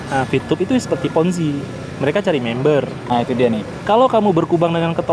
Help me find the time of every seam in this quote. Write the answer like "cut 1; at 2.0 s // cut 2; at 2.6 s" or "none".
cut 1; at 3.0 s